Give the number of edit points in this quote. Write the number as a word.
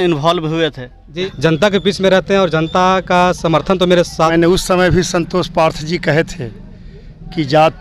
two